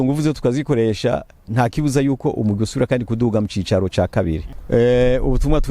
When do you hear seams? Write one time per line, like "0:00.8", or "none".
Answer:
0:04.5